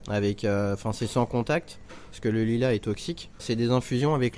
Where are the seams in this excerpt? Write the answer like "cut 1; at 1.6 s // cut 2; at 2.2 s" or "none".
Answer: cut 1; at 3.4 s